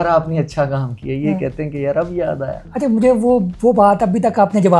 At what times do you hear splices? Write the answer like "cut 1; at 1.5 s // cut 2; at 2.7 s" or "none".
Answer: none

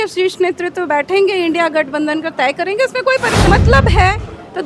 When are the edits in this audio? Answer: cut 1; at 3.5 s

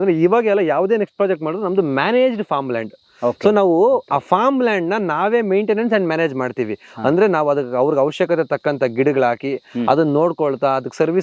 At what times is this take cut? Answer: none

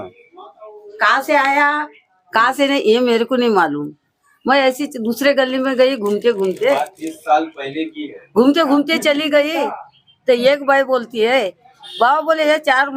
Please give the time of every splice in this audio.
none

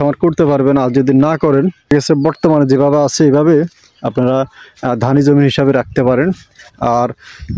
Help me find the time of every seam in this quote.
cut 1; at 1.9 s

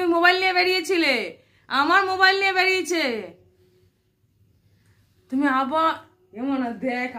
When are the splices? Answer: none

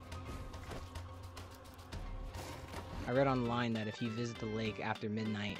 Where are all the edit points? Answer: cut 1; at 3.0 s

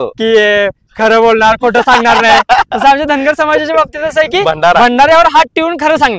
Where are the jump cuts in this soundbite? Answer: none

